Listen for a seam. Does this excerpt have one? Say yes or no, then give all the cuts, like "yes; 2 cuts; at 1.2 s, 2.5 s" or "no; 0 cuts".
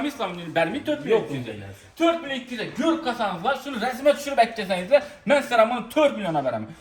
no; 0 cuts